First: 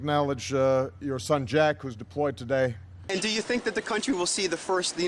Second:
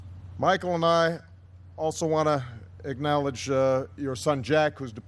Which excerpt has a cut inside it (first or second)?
first